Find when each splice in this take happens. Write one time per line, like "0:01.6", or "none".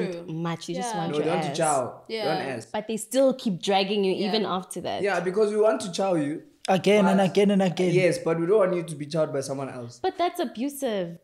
none